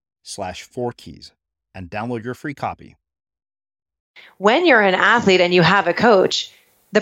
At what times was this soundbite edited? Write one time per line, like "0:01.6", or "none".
0:04.3